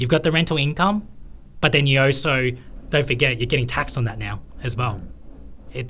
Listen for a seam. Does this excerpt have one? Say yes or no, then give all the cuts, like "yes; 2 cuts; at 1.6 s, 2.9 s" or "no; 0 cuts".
no; 0 cuts